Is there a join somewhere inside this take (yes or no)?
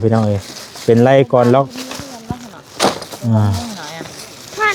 no